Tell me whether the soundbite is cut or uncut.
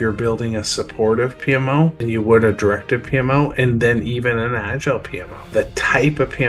cut